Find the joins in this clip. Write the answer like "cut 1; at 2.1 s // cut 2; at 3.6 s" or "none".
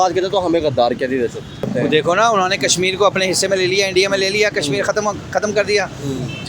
cut 1; at 1.7 s